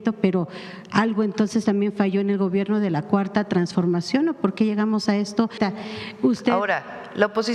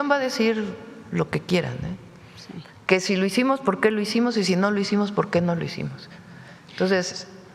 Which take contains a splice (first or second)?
first